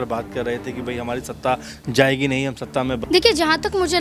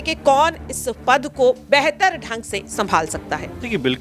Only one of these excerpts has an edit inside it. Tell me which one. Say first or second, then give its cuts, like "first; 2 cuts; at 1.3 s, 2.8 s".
first; 1 cut; at 3.0 s